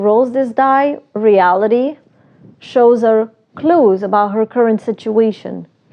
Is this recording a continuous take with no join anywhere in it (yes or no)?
yes